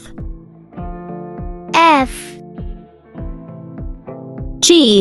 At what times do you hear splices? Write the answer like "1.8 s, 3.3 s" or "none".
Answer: 2.1 s, 3.9 s